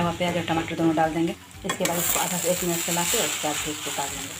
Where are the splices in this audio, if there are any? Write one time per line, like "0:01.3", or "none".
none